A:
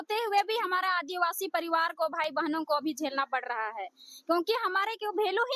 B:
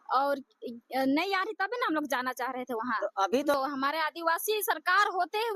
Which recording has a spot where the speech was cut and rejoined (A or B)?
B